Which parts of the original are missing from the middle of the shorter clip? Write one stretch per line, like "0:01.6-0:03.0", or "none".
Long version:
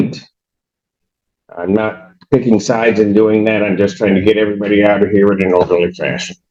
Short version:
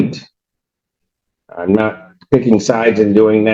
none

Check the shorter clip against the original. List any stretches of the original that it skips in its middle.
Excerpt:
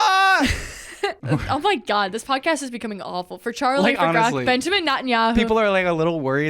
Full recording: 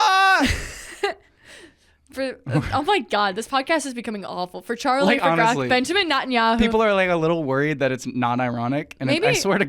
0:01.2-0:02.4

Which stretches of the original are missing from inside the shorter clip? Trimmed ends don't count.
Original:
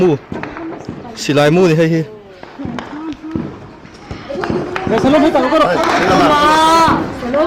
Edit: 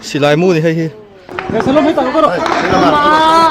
0:02.5-0:04.7

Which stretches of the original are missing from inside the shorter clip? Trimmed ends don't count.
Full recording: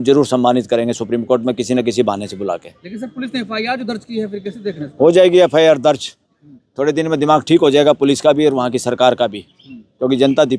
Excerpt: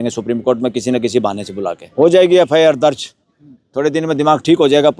0:02.7-0:04.9

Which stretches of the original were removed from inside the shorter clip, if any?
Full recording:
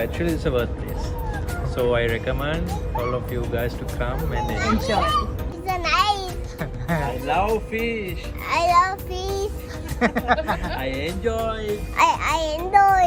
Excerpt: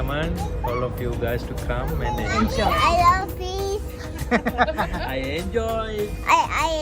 0:05.1-0:08.5

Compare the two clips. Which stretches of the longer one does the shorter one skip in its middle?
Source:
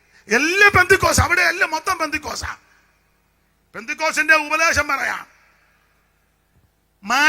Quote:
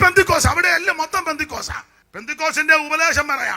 0:02.7-0:03.6

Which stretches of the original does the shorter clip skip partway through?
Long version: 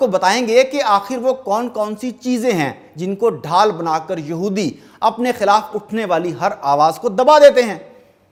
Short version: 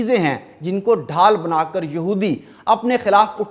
none

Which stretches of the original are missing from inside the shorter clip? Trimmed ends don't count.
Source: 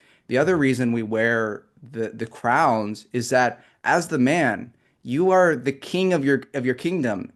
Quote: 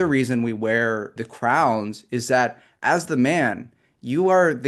0:01.7-0:02.2

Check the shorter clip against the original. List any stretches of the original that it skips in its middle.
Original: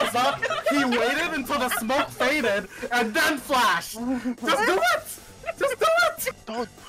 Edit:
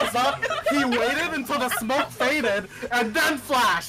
none

